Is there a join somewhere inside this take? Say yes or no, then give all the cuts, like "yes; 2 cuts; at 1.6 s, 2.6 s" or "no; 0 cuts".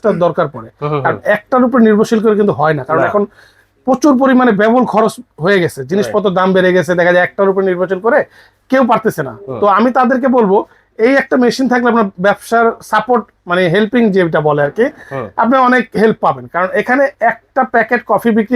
no; 0 cuts